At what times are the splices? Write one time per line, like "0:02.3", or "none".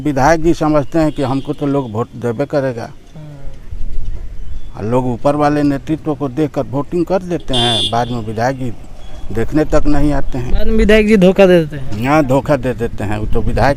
none